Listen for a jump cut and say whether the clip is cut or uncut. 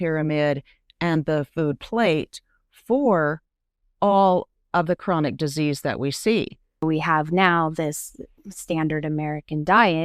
cut